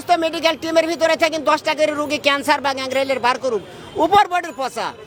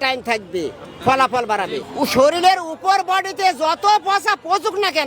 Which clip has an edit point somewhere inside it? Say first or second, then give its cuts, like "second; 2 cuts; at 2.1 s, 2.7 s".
second; 1 cut; at 1.9 s